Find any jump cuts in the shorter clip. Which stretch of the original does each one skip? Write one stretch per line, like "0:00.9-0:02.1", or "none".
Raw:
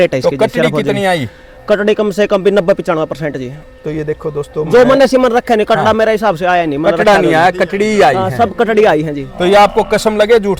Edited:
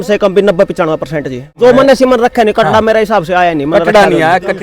0:03.6-0:04.7

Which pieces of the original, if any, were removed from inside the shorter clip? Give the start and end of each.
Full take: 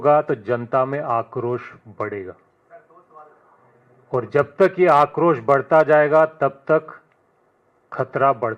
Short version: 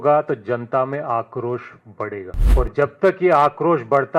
0:02.4-0:03.9

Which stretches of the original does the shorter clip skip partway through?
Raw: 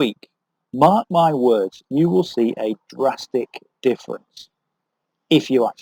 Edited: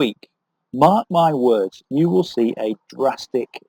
none

